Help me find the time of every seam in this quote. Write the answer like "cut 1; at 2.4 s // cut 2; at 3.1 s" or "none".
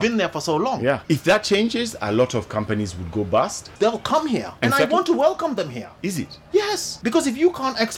cut 1; at 1.0 s // cut 2; at 3.7 s // cut 3; at 4.5 s // cut 4; at 5.8 s // cut 5; at 6.9 s